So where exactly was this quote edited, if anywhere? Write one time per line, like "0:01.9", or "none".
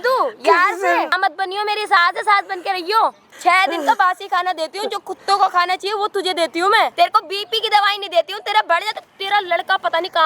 0:01.1
0:03.3
0:06.9

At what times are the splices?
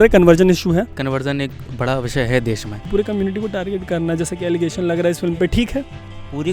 0:00.9
0:02.8

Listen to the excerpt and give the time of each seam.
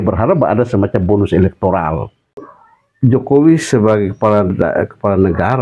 0:02.5

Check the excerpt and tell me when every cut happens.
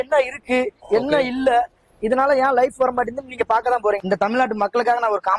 0:04.0

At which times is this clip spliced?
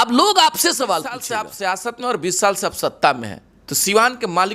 0:01.4

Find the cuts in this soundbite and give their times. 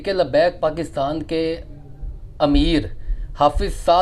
none

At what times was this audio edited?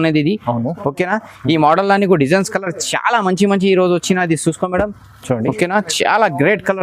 none

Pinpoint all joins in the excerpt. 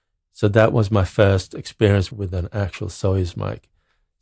0:02.1

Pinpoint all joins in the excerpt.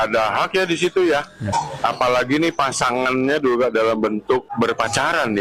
0:01.5
0:04.5

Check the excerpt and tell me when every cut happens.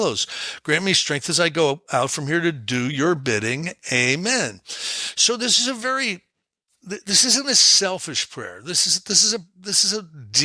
none

